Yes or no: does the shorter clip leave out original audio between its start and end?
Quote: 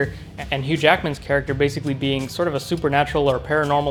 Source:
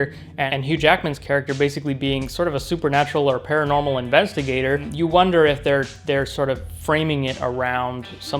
no